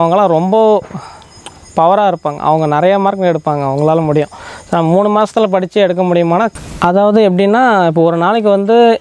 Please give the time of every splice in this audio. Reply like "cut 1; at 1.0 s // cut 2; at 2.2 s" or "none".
cut 1; at 6.6 s

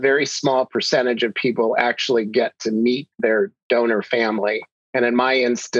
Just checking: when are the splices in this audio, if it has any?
cut 1; at 4.7 s

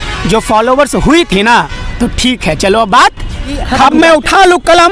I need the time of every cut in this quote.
cut 1; at 3.8 s

